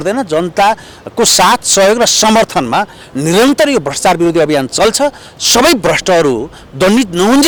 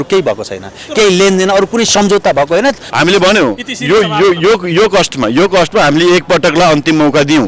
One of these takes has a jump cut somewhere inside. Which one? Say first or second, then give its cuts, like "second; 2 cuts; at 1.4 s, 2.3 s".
second; 1 cut; at 2.9 s